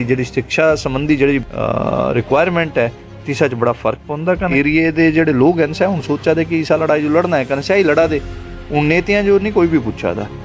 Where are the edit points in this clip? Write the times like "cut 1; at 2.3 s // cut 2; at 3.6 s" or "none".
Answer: cut 1; at 1.5 s // cut 2; at 4.5 s